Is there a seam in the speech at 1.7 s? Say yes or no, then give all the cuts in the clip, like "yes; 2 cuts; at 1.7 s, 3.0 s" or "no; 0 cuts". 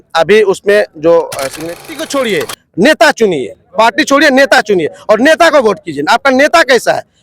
yes; 1 cut; at 1.7 s